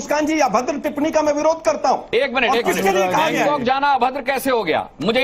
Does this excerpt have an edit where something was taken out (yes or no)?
yes